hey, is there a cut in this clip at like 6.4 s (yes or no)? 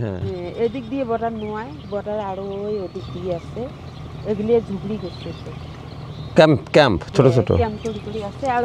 no